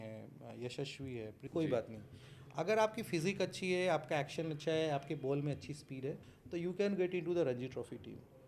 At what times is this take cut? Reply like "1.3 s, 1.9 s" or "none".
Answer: 1.4 s, 6.3 s

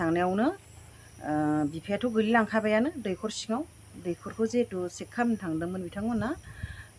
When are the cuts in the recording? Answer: none

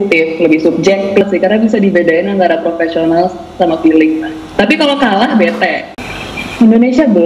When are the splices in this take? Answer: 1.2 s, 5.9 s

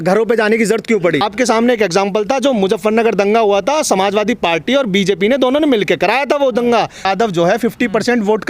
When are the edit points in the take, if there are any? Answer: 1.3 s, 7.1 s

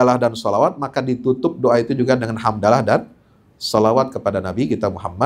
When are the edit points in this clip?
none

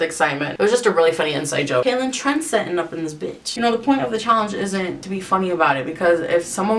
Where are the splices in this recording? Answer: 1.8 s, 3.5 s, 5.0 s

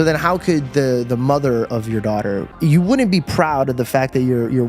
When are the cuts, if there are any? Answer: 2.5 s

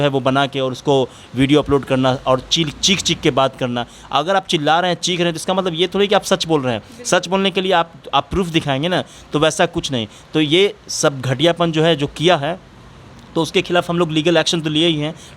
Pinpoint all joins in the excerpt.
none

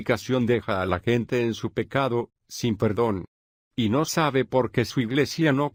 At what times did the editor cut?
none

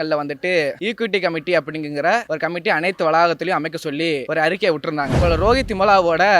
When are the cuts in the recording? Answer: 0.8 s, 2.3 s, 4.2 s, 5.1 s

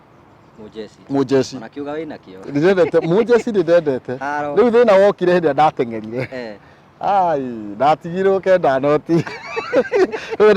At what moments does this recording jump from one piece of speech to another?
none

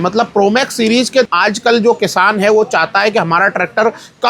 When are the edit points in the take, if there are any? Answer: 1.3 s

